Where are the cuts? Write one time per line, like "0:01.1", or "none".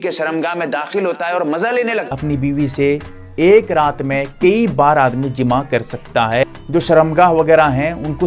0:02.1
0:06.5